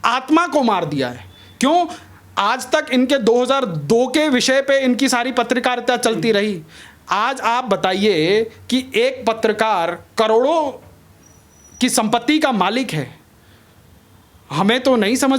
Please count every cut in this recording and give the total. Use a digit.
0